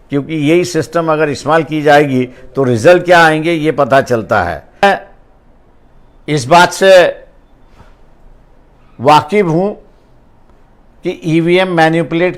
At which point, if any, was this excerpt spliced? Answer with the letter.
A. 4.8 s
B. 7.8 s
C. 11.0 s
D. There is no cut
A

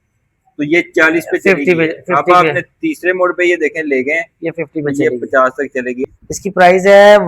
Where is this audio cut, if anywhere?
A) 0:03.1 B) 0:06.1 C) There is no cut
B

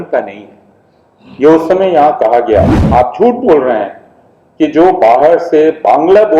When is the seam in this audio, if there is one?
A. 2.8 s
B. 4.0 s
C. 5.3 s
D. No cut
A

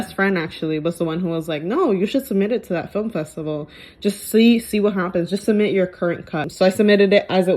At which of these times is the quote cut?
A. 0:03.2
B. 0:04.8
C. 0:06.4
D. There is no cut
C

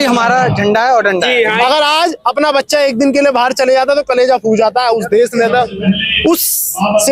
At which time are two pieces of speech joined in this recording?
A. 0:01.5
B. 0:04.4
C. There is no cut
A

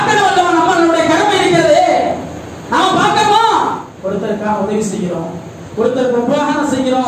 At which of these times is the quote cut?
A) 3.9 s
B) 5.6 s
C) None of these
A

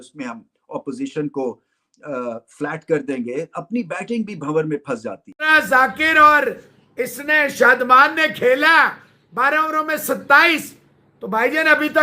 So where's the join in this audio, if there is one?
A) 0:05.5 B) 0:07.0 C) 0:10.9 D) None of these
A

